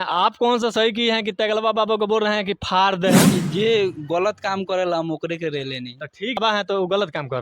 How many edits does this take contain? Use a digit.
2